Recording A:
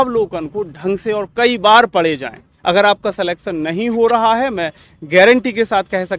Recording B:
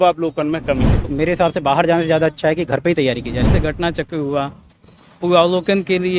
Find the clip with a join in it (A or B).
B